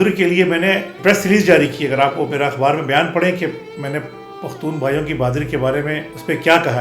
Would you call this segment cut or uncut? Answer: uncut